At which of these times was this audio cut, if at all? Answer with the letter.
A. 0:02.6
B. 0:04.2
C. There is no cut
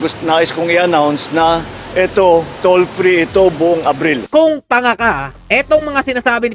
B